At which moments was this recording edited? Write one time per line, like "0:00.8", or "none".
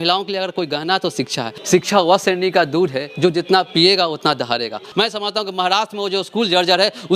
0:01.6
0:04.8